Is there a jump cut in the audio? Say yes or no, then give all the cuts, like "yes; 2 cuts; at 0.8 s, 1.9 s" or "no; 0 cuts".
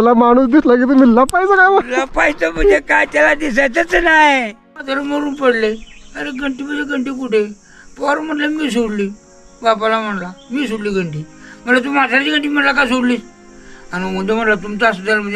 yes; 1 cut; at 4.8 s